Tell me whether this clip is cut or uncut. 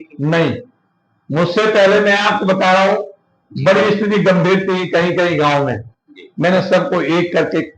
uncut